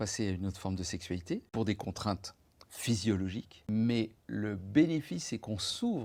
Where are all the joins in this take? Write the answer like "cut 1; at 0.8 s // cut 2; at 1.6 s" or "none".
cut 1; at 1.5 s // cut 2; at 3.6 s